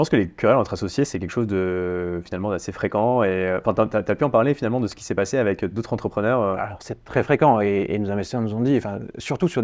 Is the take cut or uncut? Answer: uncut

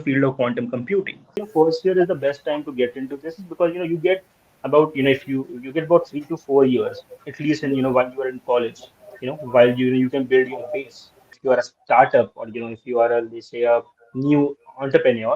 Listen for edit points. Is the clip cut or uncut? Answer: cut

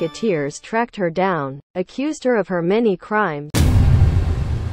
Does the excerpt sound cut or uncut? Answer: cut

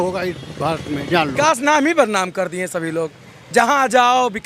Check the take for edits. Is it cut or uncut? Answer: cut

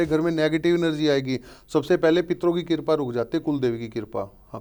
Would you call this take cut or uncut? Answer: uncut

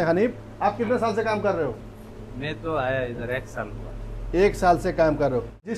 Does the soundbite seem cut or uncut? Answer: uncut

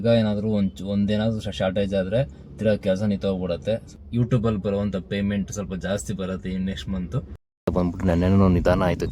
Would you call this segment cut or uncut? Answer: cut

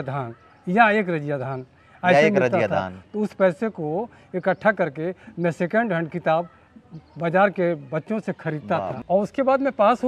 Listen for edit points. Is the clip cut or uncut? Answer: cut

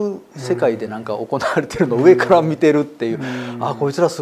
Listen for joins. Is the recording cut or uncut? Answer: uncut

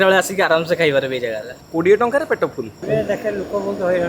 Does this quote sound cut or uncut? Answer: cut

